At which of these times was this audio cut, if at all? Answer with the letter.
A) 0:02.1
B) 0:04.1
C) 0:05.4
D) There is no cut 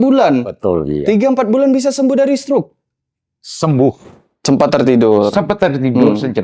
B